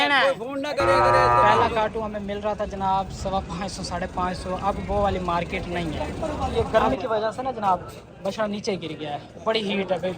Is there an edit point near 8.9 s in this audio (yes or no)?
no